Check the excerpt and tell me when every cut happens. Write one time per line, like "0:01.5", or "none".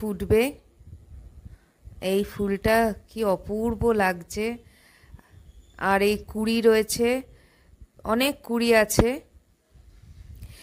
none